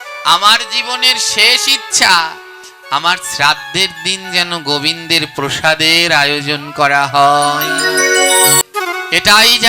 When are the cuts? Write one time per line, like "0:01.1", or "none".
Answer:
0:08.6